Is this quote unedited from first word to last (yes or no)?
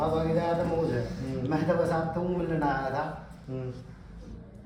yes